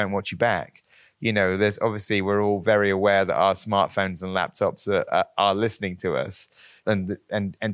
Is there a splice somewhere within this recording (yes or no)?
yes